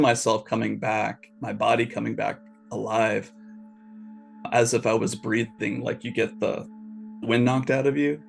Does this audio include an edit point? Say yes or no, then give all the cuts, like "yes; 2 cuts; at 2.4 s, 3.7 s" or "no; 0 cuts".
yes; 1 cut; at 7.2 s